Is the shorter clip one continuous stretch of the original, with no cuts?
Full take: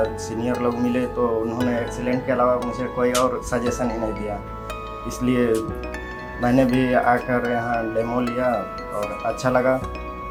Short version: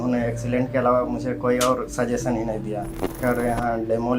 no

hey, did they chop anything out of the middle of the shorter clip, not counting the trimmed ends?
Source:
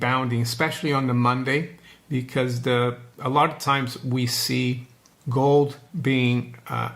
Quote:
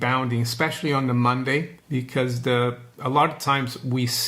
yes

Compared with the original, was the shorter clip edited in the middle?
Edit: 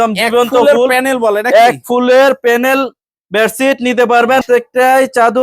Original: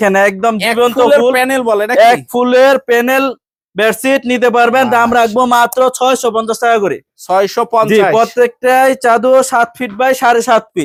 yes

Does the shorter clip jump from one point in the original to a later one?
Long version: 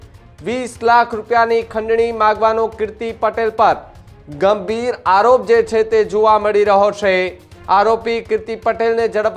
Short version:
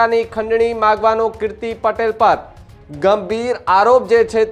no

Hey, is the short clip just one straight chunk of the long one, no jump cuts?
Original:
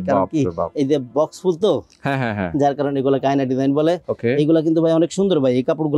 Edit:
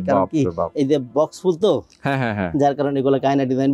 yes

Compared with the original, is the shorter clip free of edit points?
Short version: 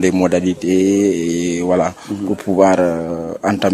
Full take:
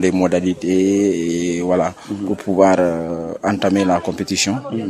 yes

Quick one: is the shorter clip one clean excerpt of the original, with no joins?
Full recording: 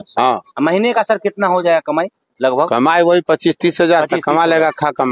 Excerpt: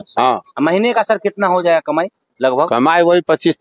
yes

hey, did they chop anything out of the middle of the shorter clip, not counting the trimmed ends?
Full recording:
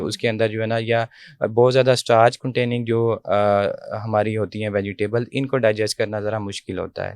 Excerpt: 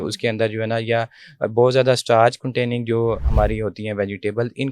yes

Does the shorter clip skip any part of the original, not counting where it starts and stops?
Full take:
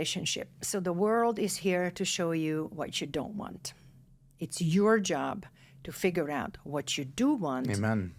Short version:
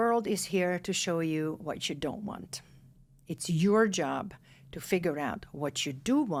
no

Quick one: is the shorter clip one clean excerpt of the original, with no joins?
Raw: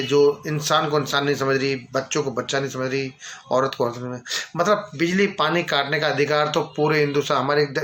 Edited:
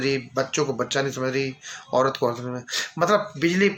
yes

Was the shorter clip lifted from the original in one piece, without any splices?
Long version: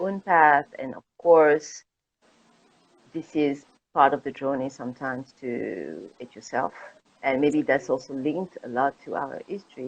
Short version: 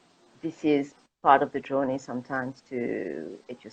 yes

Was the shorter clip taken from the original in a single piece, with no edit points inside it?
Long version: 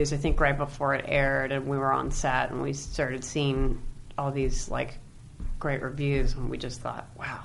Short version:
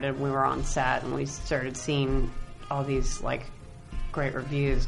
yes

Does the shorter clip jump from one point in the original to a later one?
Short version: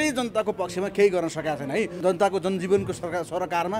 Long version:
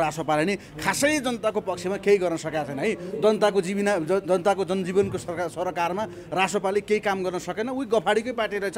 yes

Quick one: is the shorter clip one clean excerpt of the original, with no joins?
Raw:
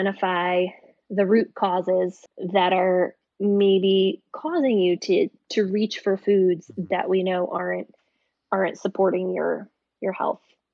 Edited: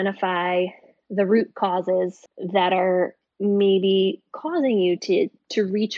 yes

